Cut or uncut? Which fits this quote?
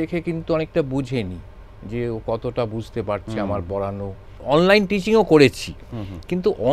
cut